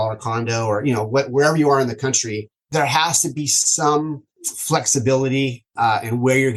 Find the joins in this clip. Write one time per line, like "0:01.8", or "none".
0:02.7
0:05.7